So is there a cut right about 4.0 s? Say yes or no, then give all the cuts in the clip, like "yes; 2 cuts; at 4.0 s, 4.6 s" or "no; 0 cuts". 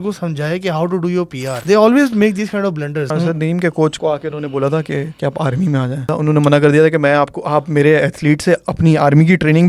yes; 5 cuts; at 1.6 s, 3.1 s, 4.0 s, 5.1 s, 6.1 s